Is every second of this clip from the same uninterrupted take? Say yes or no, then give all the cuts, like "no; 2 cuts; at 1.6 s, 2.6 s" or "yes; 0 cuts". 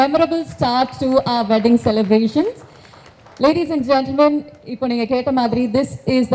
yes; 0 cuts